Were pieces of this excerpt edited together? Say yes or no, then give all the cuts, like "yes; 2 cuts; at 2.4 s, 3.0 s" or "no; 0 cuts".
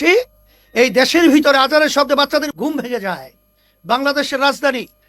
yes; 1 cut; at 2.5 s